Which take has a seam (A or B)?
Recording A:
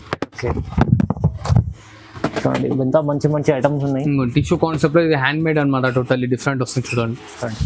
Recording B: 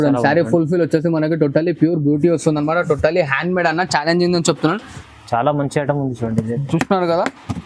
B